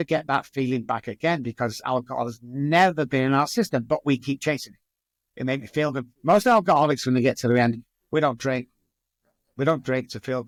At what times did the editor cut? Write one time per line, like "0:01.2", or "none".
none